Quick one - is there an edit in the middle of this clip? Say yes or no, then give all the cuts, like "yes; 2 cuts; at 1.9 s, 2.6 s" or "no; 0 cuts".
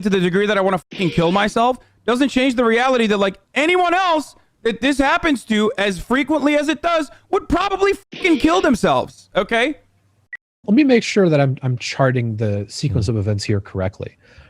yes; 1 cut; at 10.6 s